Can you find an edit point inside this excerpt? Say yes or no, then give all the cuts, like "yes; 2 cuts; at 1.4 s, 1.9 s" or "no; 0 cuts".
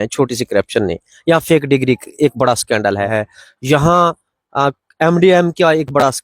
yes; 1 cut; at 3.1 s